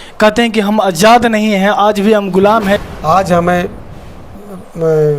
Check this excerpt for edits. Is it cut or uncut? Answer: cut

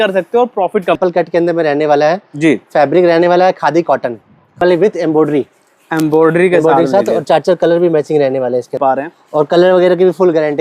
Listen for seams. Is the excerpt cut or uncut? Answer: cut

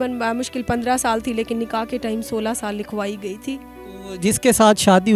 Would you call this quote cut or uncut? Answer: uncut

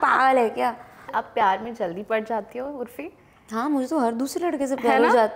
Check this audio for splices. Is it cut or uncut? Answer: cut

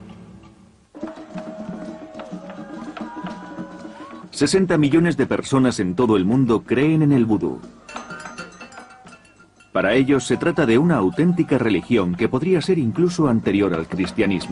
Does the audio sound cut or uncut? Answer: cut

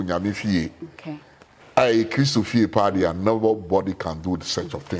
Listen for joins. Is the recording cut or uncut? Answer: uncut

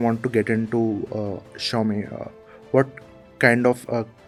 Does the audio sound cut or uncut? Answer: uncut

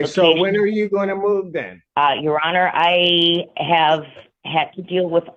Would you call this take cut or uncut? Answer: cut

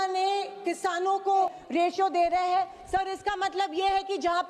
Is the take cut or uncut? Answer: cut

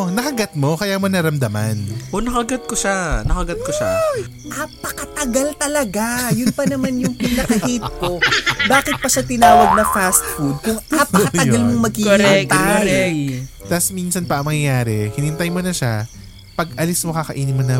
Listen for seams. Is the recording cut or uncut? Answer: cut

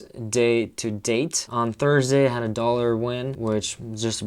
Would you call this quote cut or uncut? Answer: cut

